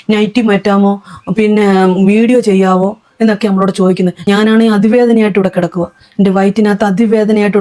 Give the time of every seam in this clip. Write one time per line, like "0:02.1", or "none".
0:04.3

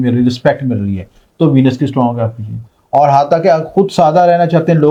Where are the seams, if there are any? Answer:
none

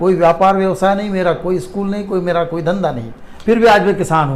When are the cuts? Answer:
none

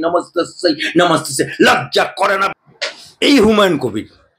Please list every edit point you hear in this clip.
0:02.6

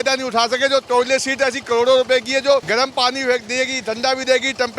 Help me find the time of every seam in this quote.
0:02.7

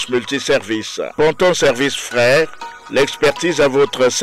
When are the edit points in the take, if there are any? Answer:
none

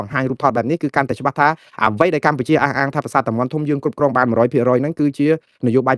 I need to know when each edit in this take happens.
none

